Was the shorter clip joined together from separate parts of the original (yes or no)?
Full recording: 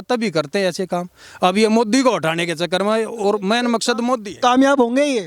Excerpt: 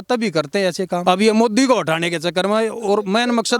yes